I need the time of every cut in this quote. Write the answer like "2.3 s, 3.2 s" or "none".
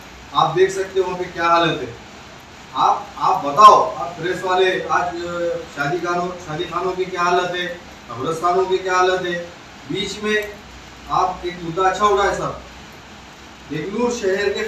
none